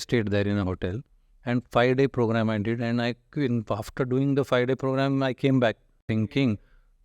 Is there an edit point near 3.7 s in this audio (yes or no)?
no